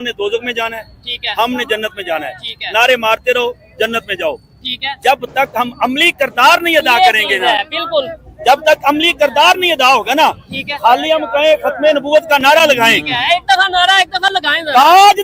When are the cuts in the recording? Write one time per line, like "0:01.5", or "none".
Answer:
none